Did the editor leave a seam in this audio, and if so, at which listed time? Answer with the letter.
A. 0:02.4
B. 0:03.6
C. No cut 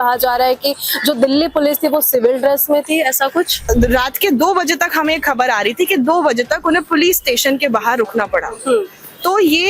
B